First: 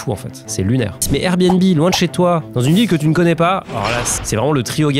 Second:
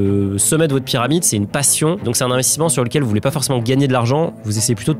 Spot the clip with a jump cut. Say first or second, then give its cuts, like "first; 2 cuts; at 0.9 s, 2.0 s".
first; 2 cuts; at 1.0 s, 4.1 s